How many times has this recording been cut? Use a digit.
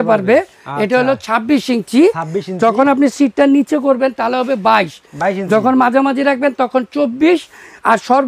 0